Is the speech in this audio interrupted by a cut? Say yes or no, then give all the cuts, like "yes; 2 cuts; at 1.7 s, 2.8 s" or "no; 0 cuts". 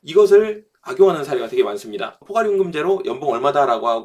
yes; 1 cut; at 2.2 s